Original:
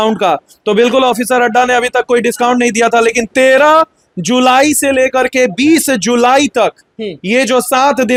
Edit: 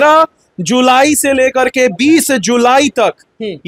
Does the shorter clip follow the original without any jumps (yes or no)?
yes